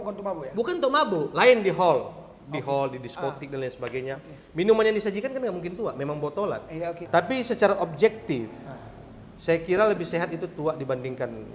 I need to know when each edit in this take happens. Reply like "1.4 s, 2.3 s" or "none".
7.0 s